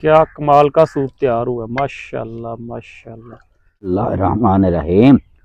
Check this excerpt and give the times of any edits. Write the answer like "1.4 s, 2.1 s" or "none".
3.6 s